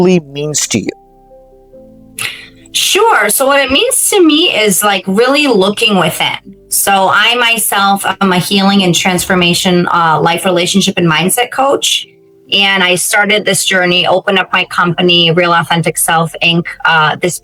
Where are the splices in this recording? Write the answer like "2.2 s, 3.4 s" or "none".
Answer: none